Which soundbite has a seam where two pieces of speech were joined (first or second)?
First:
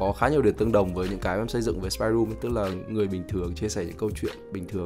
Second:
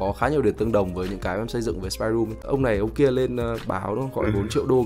second